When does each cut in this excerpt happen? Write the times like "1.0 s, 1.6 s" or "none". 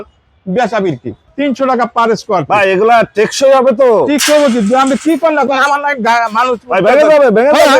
1.2 s

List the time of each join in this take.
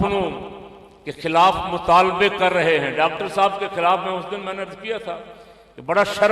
none

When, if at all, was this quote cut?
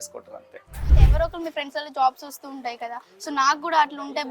0.9 s

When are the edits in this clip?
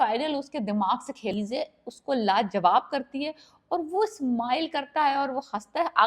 1.3 s

